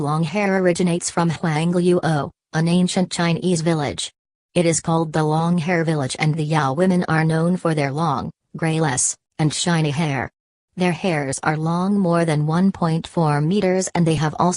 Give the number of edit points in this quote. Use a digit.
1